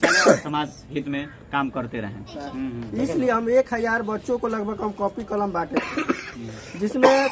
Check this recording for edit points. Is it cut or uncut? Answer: cut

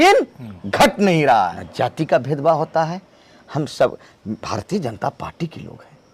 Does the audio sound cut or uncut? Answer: cut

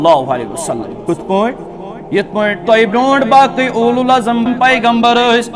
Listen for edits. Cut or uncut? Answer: cut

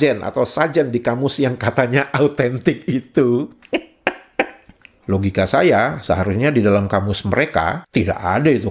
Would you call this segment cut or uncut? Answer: cut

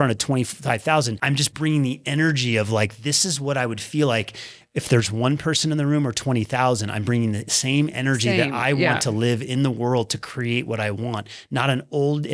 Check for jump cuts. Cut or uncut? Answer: cut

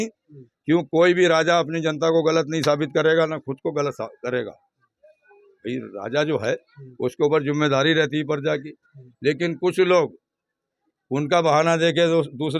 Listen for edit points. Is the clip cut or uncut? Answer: uncut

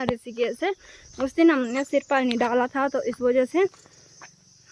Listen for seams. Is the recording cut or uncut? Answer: uncut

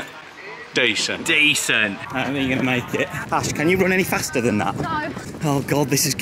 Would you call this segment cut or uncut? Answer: cut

